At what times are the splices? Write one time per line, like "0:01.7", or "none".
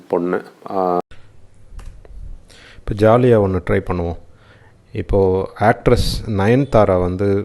0:01.0